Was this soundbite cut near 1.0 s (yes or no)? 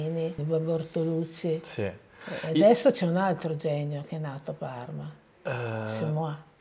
no